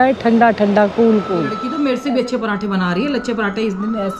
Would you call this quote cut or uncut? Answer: cut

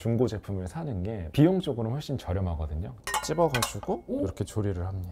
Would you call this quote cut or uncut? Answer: cut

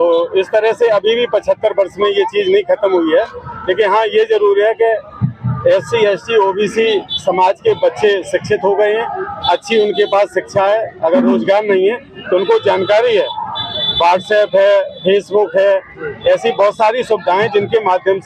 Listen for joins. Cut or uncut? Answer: uncut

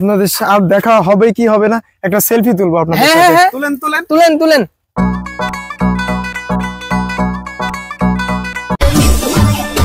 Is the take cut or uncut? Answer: uncut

